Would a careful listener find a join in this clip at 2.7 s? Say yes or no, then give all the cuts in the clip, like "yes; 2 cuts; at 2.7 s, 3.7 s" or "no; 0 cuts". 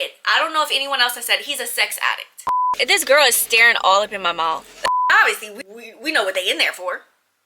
yes; 2 cuts; at 2.7 s, 4.9 s